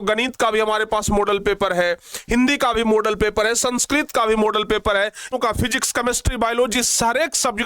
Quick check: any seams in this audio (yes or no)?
yes